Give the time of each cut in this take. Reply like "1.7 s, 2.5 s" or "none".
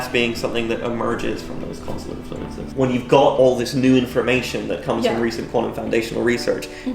2.6 s